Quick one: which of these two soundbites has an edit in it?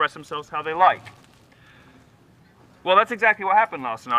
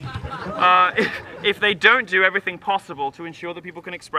first; 1 cut; at 2.2 s

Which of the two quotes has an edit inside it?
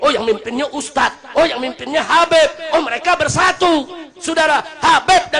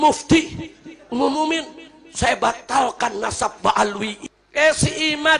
second; 1 cut; at 4.2 s

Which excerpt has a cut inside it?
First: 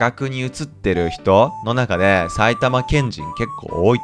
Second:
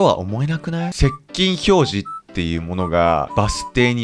second; 2 cuts; at 0.9 s, 3.3 s

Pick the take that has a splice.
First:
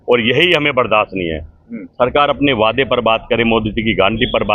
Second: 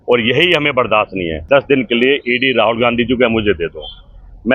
second; 1 cut; at 1.4 s

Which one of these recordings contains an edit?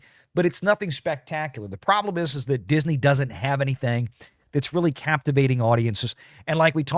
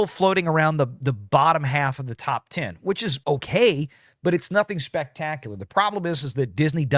second; 1 cut; at 1.0 s

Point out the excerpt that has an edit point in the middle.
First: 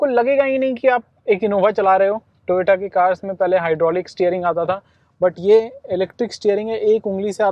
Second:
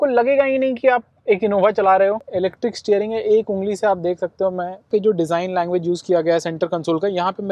second; 2 cuts; at 2.3 s, 4.8 s

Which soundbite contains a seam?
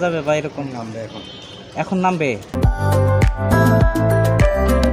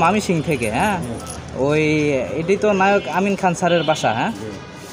first; 2 cuts; at 2.6 s, 3.8 s

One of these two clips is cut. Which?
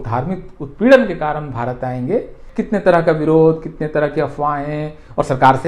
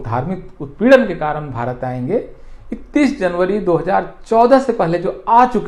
first; 1 cut; at 2.4 s

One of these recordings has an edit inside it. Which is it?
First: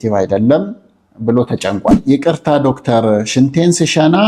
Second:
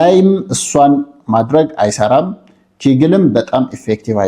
first; 1 cut; at 2.0 s

